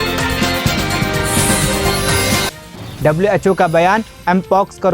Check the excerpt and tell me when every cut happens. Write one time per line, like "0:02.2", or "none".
0:02.4